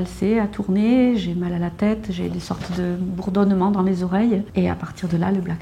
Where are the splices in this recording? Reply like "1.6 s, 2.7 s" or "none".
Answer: 4.5 s